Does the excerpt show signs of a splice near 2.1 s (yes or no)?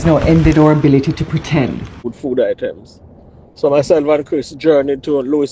yes